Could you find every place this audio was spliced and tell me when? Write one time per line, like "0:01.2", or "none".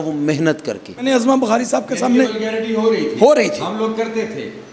0:01.1